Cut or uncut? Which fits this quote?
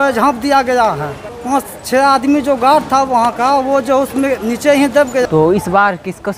cut